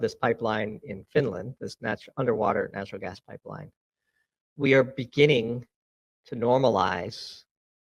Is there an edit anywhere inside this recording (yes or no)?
no